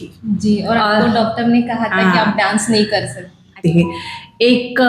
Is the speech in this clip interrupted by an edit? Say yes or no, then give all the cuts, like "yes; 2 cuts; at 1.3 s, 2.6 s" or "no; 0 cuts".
yes; 1 cut; at 3.4 s